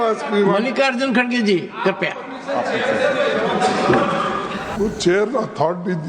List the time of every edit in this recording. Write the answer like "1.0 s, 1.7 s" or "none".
4.7 s